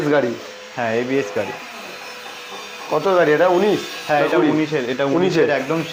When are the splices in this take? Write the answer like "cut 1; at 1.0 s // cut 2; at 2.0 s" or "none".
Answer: none